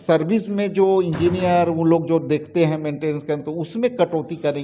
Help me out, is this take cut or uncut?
uncut